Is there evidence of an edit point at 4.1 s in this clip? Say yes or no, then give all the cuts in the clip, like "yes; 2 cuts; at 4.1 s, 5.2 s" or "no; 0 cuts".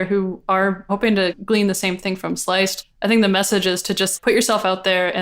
yes; 3 cuts; at 1.0 s, 2.8 s, 4.1 s